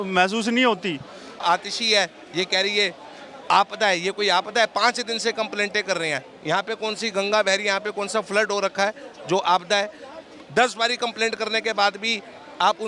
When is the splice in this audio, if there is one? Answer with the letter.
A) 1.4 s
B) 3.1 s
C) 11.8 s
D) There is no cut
A